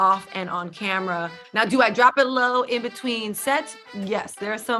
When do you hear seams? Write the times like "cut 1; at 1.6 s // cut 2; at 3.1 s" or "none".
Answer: cut 1; at 1.4 s